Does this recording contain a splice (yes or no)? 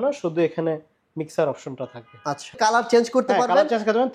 yes